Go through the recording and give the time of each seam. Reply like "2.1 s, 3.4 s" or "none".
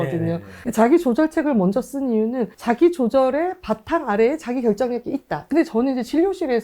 5.4 s